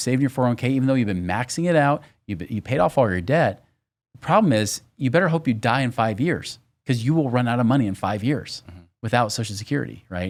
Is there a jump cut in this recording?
no; 0 cuts

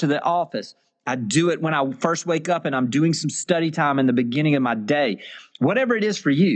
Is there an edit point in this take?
no; 0 cuts

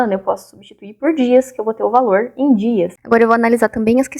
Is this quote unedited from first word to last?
no; 1 cut; at 3.0 s

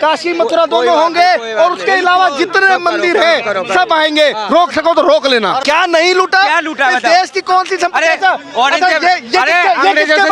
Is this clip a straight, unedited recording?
no; 1 cut; at 5.6 s

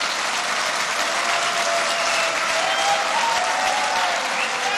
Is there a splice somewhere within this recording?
no; 0 cuts

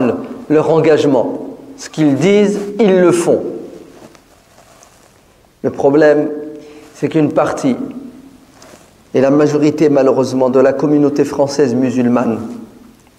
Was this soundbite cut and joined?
no; 0 cuts

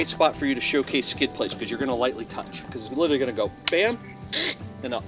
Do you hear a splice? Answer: no; 0 cuts

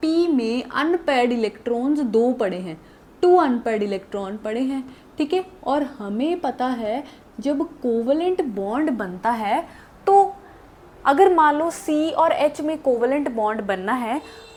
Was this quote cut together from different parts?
no; 0 cuts

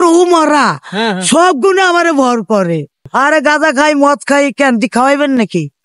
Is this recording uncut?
no; 1 cut; at 3.1 s

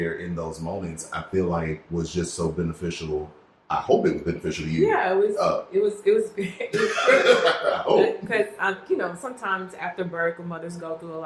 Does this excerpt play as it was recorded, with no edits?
yes; 0 cuts

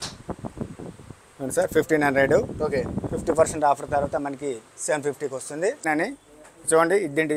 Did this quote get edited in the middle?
yes; 1 cut; at 5.9 s

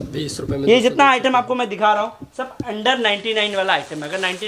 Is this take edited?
no; 0 cuts

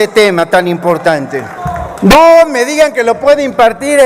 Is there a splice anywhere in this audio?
yes; 1 cut; at 1.6 s

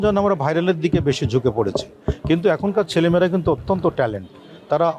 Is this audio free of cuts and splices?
yes; 0 cuts

